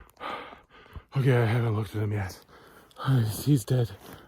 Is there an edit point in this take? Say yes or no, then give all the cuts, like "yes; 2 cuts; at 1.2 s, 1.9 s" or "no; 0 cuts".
no; 0 cuts